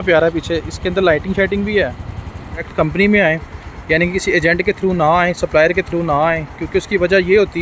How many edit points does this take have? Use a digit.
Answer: 1